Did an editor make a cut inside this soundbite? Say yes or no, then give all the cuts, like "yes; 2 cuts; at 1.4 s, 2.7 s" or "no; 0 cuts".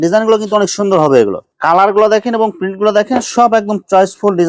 yes; 1 cut; at 1.5 s